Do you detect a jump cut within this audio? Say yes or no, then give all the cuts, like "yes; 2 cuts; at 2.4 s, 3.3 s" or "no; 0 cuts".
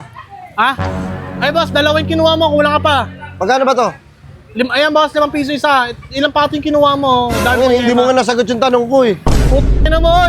no; 0 cuts